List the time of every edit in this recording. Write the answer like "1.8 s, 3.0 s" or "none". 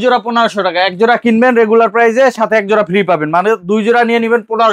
none